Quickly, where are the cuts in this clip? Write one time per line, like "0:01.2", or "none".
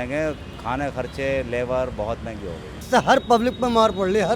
0:02.8